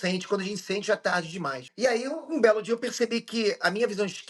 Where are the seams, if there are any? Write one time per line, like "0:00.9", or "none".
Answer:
0:01.7